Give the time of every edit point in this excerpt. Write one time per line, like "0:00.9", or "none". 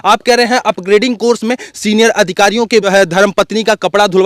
0:02.9